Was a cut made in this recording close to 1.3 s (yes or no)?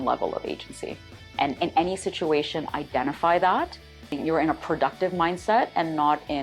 no